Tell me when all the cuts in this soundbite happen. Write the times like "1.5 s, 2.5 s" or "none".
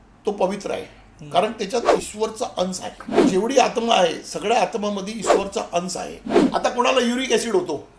3.1 s, 6.3 s